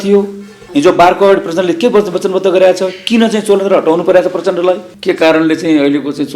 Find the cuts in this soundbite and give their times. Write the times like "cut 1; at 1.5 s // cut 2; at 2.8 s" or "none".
cut 1; at 4.9 s